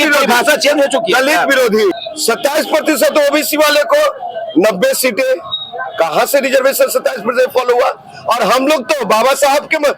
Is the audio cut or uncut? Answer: cut